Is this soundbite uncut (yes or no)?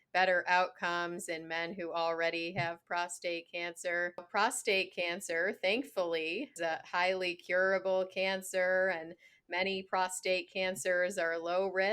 no